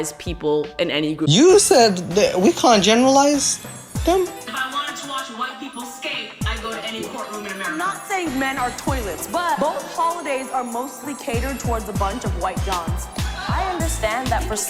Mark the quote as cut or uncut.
cut